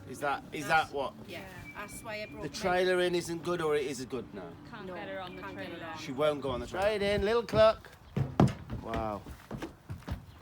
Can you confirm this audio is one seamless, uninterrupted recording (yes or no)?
no